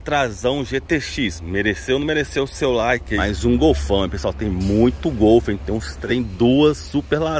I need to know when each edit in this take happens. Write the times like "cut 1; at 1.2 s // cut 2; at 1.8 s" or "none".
cut 1; at 3.1 s // cut 2; at 6.0 s